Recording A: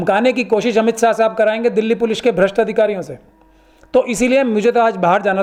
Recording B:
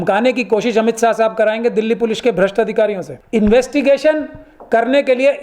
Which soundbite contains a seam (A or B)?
B